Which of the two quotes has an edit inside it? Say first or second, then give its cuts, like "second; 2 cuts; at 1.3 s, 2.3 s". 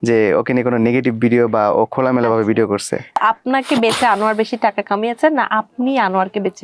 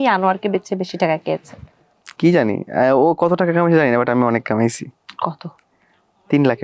first; 1 cut; at 3.2 s